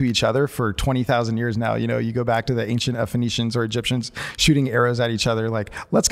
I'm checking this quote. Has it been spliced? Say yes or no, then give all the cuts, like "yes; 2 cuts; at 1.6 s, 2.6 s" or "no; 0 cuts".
no; 0 cuts